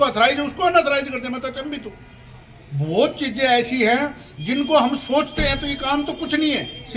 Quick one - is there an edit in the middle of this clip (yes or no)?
no